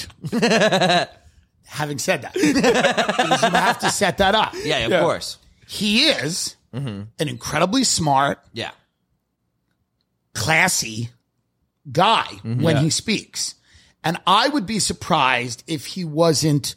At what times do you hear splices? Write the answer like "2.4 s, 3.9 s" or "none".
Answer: none